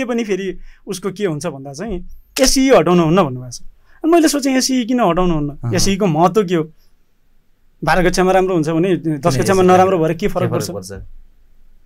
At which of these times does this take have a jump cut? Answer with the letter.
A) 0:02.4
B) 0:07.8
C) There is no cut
A